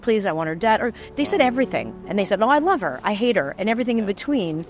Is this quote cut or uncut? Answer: uncut